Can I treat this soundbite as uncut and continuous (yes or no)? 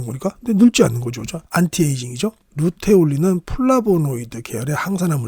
yes